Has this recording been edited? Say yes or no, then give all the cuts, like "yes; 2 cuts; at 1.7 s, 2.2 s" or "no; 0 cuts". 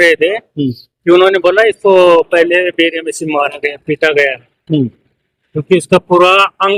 no; 0 cuts